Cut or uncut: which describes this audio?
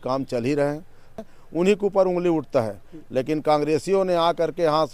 cut